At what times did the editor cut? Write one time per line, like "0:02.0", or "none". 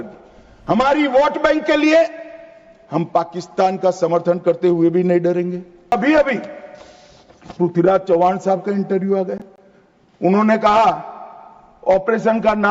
0:05.9